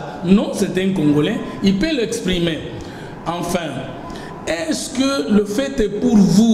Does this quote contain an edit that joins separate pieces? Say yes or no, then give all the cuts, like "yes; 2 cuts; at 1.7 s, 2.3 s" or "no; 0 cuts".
no; 0 cuts